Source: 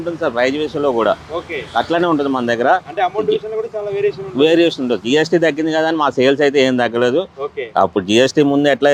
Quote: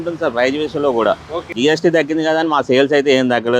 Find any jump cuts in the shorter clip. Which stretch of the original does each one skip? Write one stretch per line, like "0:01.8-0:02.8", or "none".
0:01.5-0:05.0

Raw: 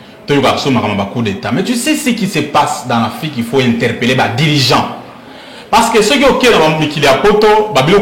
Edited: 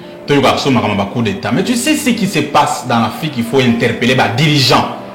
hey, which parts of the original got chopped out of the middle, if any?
none

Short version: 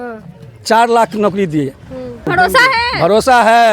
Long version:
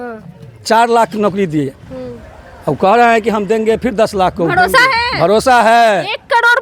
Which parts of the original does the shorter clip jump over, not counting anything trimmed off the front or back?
0:02.3-0:04.5

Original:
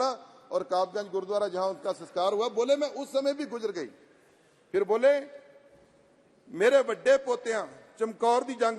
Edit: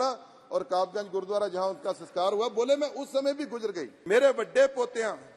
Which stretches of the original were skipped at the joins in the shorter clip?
0:03.9-0:06.4

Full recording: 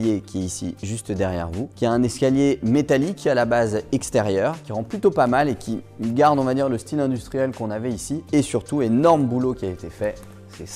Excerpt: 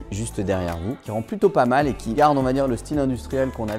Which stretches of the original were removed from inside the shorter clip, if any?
0:01.7-0:04.6
0:05.8-0:06.2

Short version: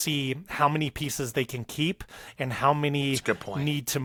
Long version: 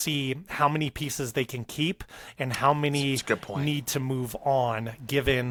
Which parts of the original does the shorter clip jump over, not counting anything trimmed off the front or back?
none

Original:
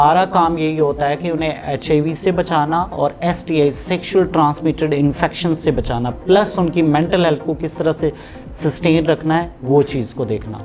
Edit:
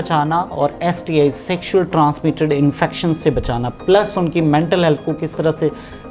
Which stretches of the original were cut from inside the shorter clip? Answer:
none

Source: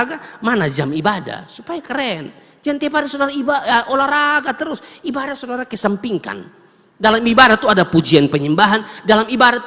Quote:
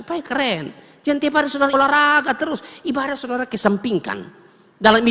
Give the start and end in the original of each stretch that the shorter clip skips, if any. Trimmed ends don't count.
0:03.3-0:03.9

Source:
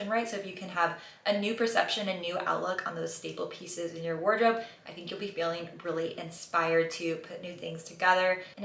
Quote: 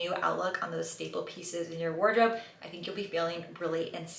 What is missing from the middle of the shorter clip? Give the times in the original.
none

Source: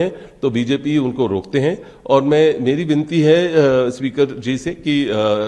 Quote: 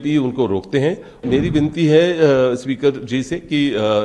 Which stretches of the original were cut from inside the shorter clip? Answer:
0:02.0-0:02.6

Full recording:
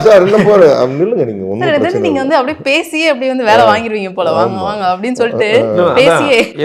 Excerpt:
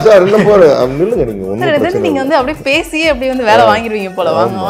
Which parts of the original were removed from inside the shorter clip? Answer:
none

